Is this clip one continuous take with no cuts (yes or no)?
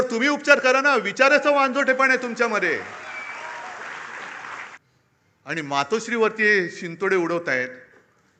no